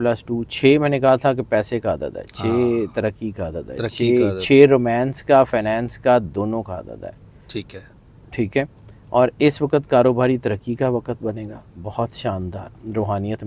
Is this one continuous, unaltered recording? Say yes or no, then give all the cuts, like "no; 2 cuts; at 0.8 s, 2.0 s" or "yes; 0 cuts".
yes; 0 cuts